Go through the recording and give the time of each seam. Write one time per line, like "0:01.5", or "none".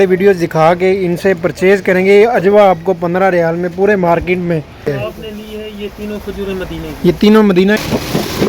0:04.9
0:07.8